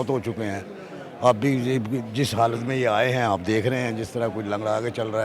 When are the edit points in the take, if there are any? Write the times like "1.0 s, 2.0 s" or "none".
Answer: none